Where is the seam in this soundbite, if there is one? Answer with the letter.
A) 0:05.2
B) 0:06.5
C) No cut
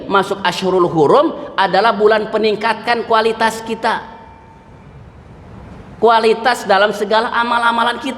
C